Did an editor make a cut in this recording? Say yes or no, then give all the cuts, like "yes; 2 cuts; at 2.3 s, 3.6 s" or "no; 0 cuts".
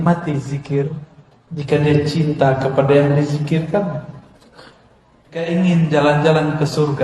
yes; 1 cut; at 5.5 s